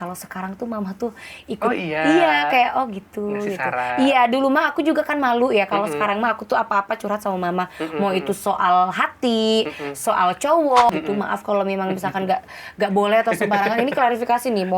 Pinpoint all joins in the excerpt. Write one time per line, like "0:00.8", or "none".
0:10.9